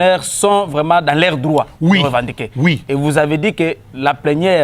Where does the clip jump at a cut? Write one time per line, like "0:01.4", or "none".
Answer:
none